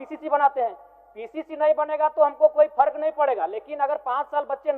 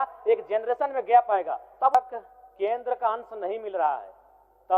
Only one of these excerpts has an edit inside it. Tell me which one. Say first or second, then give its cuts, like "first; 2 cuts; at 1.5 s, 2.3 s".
second; 1 cut; at 1.9 s